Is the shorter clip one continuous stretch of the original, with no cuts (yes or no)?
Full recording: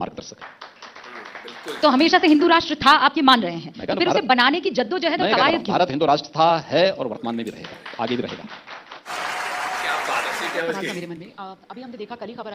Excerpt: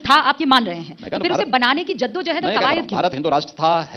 yes